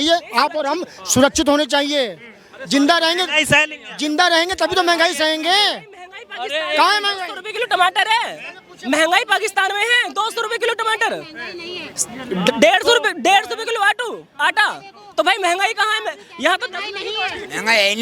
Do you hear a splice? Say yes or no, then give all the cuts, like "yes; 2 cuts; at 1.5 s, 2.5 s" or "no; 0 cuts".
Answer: no; 0 cuts